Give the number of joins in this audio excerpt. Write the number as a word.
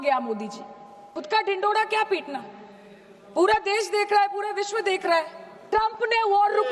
two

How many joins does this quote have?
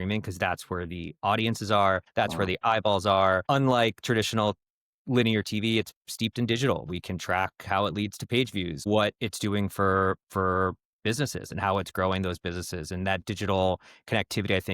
three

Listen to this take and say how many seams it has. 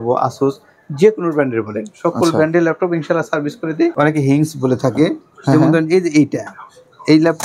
one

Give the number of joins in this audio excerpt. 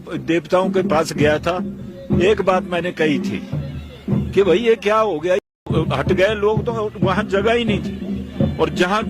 one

